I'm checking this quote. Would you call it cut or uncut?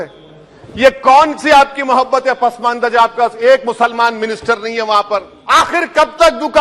cut